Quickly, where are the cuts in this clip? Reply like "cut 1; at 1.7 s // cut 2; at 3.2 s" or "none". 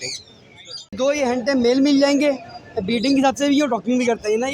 cut 1; at 0.9 s